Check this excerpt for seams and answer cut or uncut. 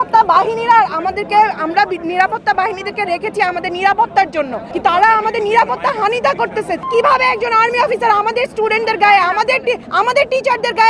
cut